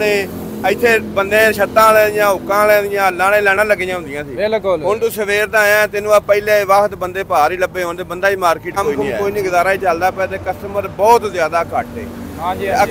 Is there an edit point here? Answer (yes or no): yes